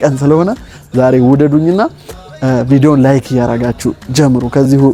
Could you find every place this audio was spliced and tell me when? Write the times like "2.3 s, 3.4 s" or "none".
none